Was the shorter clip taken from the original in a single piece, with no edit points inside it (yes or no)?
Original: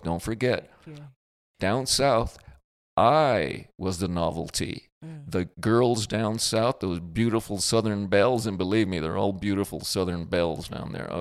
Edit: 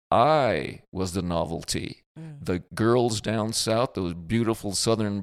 yes